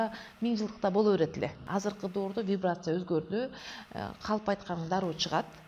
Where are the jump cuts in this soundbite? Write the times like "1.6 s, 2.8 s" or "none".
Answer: 1.6 s

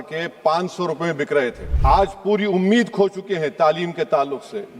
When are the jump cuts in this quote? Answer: 1.7 s

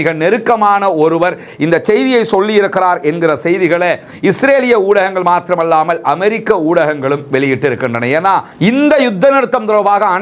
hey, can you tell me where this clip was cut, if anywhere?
8.6 s

